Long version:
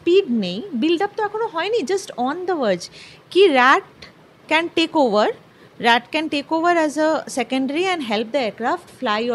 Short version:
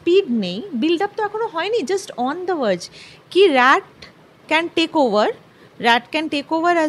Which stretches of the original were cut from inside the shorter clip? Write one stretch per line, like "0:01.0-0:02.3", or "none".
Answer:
none